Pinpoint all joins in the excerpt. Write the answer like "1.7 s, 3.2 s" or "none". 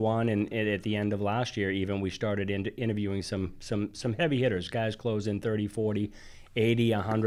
none